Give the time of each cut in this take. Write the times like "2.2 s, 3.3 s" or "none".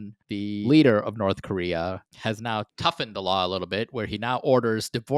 2.7 s

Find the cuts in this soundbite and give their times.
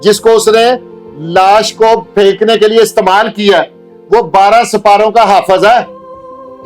none

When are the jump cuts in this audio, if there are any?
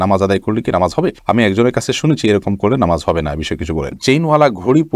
3.9 s

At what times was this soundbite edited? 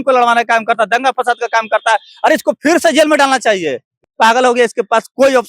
3.9 s

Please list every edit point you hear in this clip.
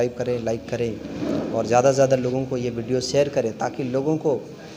none

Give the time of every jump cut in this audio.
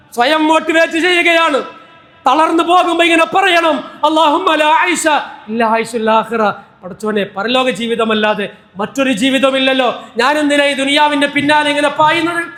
none

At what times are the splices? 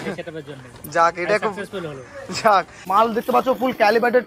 2.8 s

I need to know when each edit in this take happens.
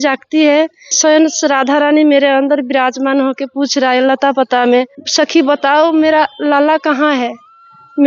0.9 s, 5.0 s

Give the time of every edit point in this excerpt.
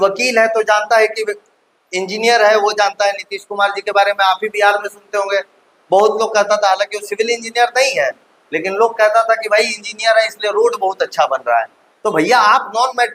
none

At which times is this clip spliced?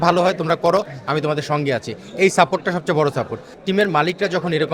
3.5 s

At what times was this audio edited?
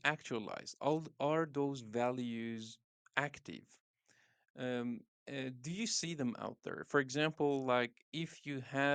none

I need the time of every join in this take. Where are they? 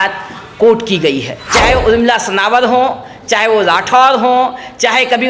1.4 s

